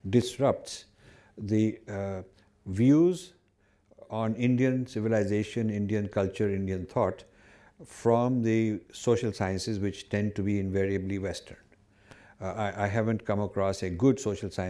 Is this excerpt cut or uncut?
uncut